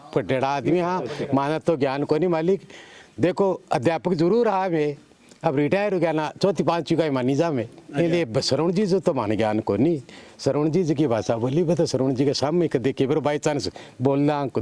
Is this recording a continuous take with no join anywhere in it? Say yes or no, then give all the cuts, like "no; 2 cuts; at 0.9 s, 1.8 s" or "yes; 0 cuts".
yes; 0 cuts